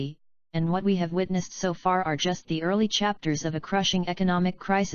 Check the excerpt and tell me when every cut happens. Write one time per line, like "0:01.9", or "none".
0:02.3